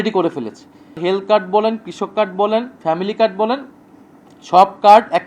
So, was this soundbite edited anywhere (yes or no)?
yes